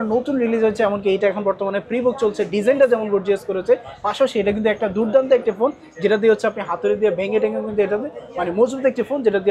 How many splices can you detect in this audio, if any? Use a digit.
0